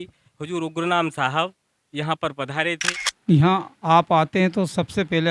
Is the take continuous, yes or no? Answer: no